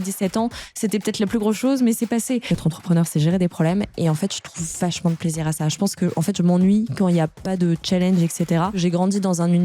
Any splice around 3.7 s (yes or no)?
no